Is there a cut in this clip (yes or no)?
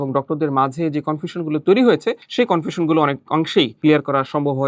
yes